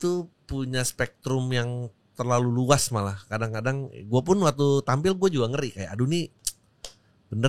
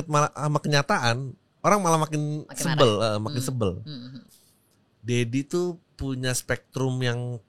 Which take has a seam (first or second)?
second